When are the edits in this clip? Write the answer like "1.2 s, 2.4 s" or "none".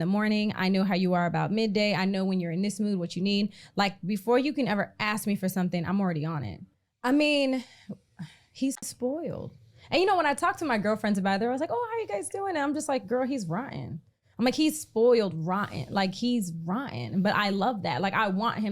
8.8 s